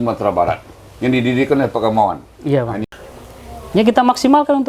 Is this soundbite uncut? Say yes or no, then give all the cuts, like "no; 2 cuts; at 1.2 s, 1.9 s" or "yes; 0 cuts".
no; 1 cut; at 2.9 s